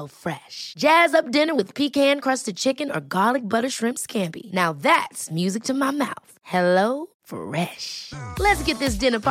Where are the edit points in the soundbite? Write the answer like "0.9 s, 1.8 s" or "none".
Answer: none